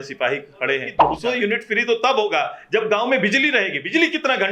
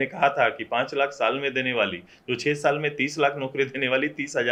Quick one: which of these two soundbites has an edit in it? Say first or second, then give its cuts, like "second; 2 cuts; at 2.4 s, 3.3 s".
first; 1 cut; at 0.9 s